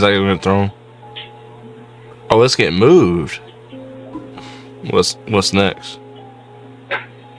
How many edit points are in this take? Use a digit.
2